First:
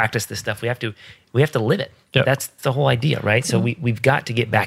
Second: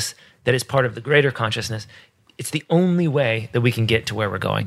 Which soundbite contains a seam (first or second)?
first